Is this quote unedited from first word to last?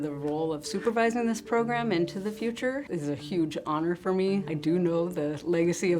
no; 2 cuts; at 2.8 s, 4.5 s

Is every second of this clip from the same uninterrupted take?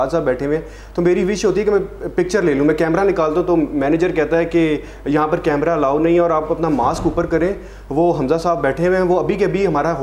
yes; 0 cuts

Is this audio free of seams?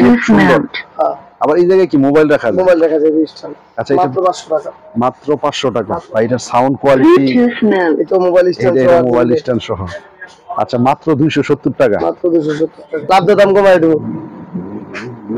no; 2 cuts; at 6.0 s, 12.9 s

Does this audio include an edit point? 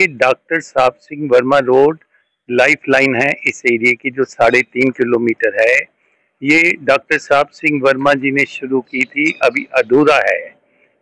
no; 0 cuts

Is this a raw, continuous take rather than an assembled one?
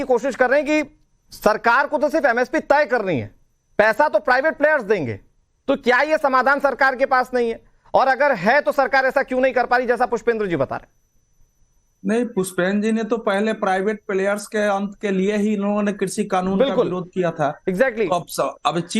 no; 1 cut; at 14.0 s

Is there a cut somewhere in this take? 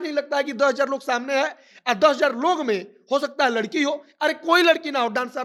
no; 0 cuts

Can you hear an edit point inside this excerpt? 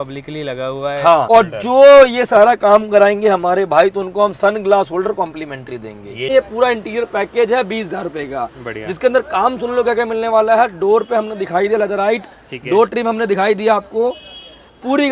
yes; 2 cuts; at 1.3 s, 6.3 s

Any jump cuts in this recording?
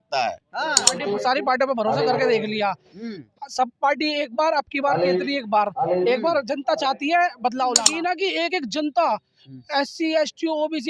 yes; 2 cuts; at 0.9 s, 7.9 s

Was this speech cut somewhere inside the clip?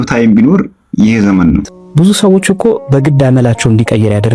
yes; 1 cut; at 1.8 s

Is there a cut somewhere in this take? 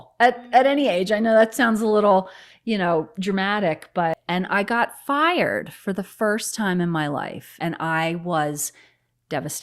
yes; 2 cuts; at 4.1 s, 7.5 s

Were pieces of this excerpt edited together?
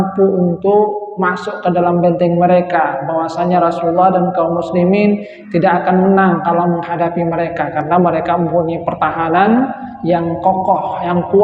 no; 0 cuts

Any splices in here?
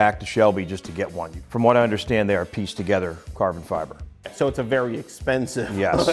yes; 2 cuts; at 1.3 s, 4.2 s

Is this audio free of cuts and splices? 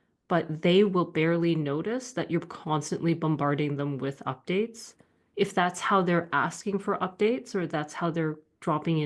yes; 0 cuts

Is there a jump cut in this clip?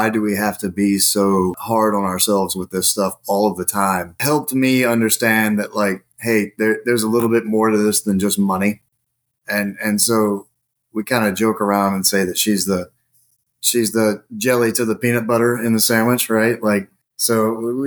no; 0 cuts

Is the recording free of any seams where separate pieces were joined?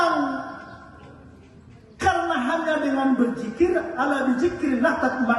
yes; 0 cuts

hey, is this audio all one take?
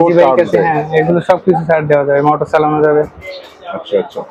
yes; 0 cuts

